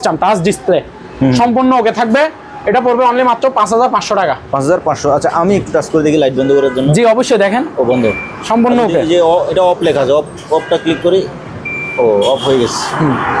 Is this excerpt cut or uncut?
uncut